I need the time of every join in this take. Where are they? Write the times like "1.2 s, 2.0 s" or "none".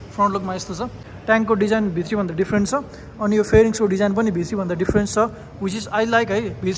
1.1 s

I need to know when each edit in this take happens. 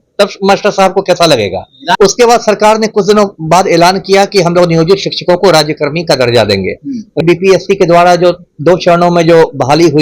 2.0 s, 7.2 s

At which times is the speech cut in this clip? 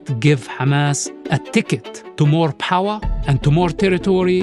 1.1 s, 2.0 s

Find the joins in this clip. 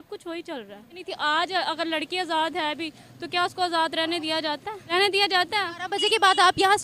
4.8 s

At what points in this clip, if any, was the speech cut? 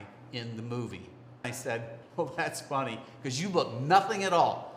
1.5 s

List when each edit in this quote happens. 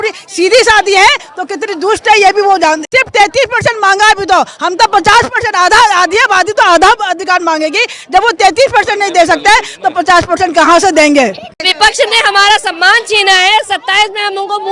2.9 s, 11.7 s

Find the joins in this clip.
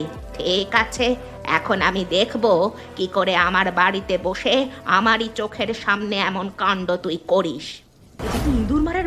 8.2 s

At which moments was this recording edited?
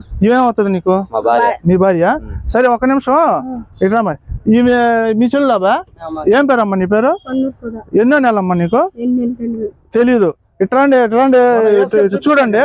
5.7 s

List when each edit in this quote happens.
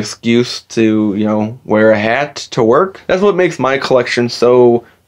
3.0 s

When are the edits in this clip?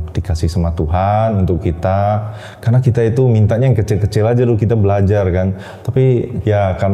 none

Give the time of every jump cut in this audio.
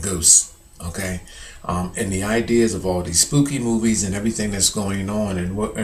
none

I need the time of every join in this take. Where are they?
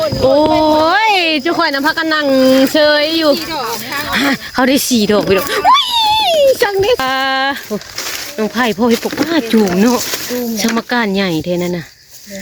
7.0 s

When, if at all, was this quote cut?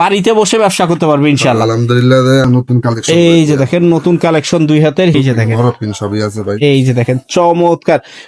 2.5 s, 5.1 s

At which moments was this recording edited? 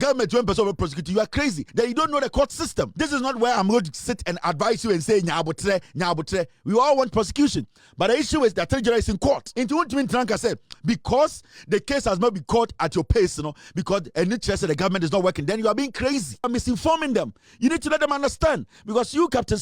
1.6 s, 2.9 s, 9.5 s, 16.4 s

